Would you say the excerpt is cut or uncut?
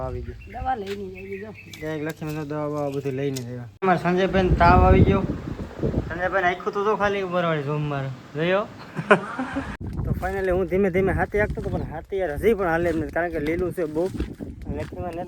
cut